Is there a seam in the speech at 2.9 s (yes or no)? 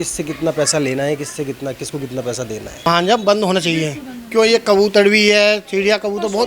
yes